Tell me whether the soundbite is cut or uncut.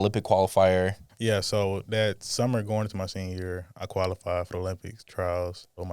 cut